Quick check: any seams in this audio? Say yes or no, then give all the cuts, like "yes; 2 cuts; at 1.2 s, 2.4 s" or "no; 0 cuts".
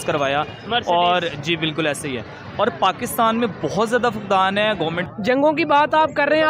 yes; 1 cut; at 5.1 s